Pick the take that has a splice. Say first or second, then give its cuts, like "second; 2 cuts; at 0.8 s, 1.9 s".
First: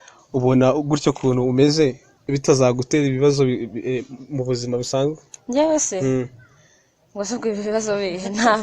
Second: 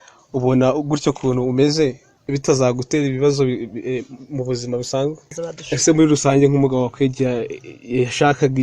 second; 1 cut; at 5.3 s